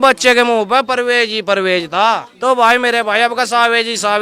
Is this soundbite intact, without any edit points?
no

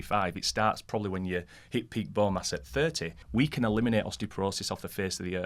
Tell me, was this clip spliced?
yes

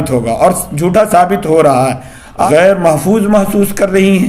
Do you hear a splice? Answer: yes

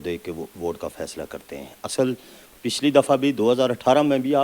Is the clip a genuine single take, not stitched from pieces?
yes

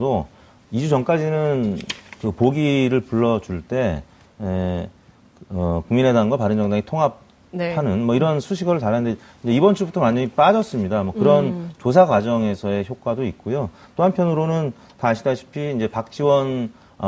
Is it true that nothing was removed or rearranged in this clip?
yes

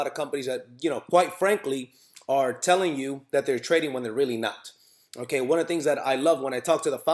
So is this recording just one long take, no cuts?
no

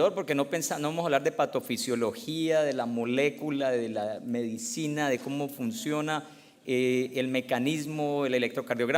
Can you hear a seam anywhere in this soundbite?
no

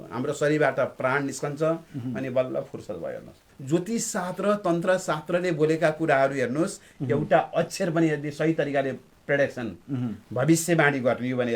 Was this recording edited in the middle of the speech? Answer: yes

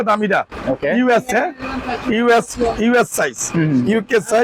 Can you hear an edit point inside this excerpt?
no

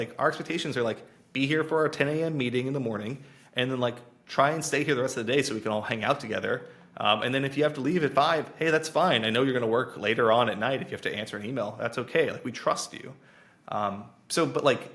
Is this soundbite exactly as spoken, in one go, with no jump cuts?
yes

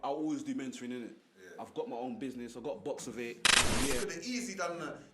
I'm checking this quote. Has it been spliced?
yes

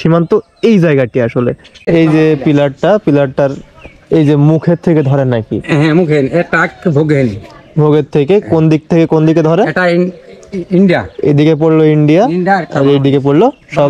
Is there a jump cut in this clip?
yes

